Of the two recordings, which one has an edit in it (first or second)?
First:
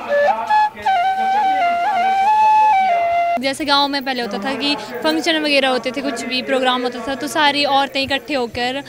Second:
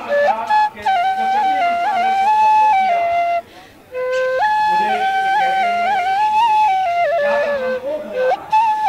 first